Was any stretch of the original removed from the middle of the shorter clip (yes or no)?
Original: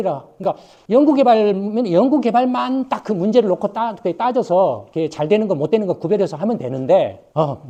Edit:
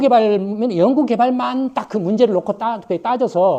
no